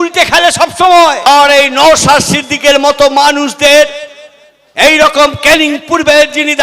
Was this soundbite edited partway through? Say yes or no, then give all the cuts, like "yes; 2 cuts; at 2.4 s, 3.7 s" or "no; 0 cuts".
yes; 1 cut; at 1.3 s